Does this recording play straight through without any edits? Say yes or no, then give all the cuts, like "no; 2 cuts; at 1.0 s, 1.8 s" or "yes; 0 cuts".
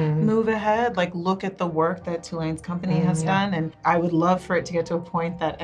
no; 1 cut; at 3.7 s